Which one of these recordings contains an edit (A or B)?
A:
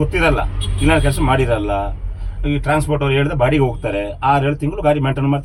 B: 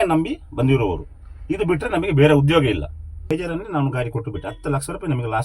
B